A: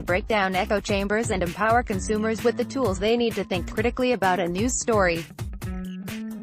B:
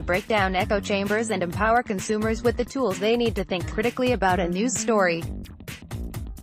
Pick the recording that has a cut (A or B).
A